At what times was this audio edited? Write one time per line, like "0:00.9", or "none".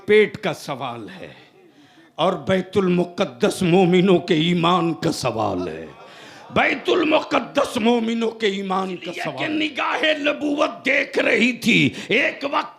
0:09.2